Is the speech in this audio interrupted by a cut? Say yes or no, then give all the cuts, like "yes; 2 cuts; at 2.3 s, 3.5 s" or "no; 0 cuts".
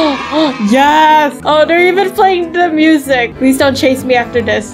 yes; 2 cuts; at 1.4 s, 3.3 s